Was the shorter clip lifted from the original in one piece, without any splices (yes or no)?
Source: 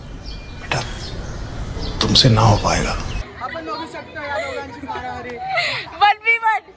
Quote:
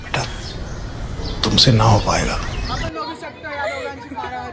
no